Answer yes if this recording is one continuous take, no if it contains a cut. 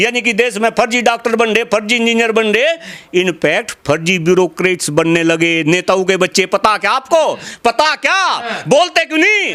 yes